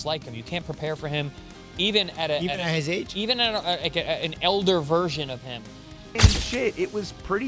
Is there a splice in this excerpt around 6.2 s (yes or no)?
yes